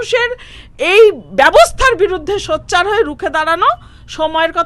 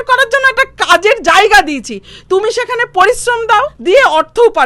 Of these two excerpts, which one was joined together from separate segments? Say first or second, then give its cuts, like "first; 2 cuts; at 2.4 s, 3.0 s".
second; 1 cut; at 3.7 s